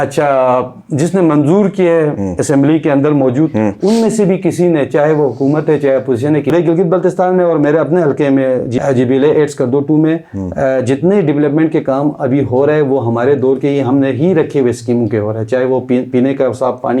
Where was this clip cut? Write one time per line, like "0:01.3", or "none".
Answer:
0:06.5
0:08.7